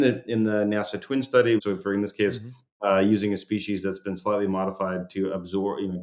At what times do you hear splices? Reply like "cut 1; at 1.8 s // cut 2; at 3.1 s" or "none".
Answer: cut 1; at 1.6 s